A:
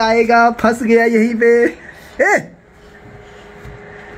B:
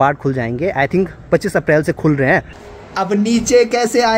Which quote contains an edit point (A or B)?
B